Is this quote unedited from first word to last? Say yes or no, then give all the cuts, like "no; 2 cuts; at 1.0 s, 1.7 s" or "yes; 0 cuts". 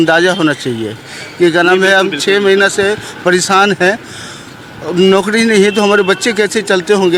yes; 0 cuts